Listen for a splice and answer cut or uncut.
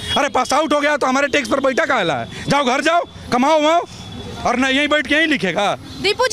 uncut